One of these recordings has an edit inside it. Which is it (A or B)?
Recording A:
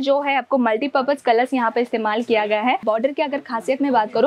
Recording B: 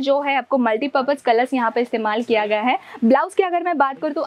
A